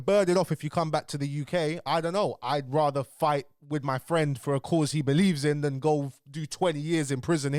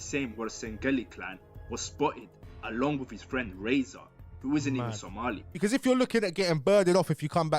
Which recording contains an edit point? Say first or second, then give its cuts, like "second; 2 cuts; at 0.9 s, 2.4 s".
second; 1 cut; at 5.5 s